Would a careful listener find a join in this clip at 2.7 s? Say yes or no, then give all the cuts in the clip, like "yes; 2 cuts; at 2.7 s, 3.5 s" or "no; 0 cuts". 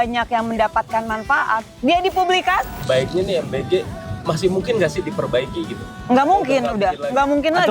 yes; 1 cut; at 2.7 s